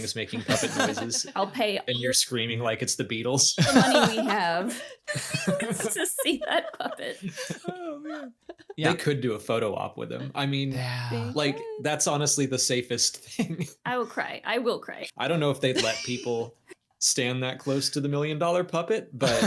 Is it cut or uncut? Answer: cut